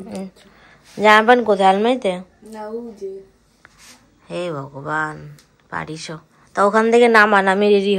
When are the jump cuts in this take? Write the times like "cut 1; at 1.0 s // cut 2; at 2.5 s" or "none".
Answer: none